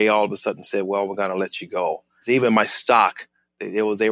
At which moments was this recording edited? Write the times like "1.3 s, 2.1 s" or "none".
2.2 s